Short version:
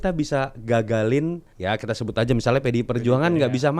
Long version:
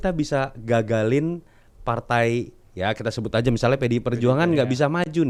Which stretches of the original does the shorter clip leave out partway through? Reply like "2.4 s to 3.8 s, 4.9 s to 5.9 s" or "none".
1.5 s to 2.6 s